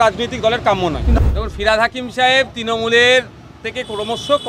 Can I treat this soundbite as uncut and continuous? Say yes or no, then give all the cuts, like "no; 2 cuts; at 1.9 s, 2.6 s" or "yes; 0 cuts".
no; 1 cut; at 1.2 s